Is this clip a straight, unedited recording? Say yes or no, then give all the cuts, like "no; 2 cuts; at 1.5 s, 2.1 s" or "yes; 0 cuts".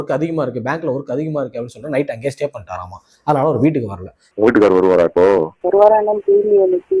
yes; 0 cuts